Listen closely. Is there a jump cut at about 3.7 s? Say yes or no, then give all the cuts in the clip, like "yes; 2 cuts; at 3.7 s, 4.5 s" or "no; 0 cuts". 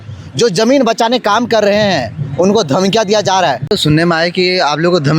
yes; 1 cut; at 3.7 s